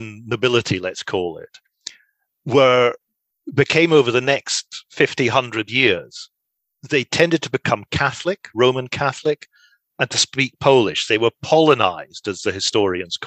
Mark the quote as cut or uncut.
uncut